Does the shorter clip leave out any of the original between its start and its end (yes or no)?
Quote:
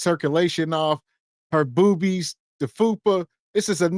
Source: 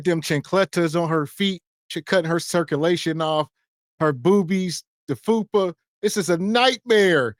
no